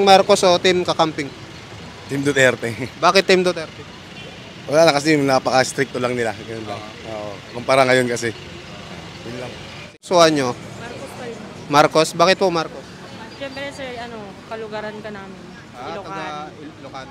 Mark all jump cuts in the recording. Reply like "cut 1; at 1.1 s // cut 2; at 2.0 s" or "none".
cut 1; at 9.9 s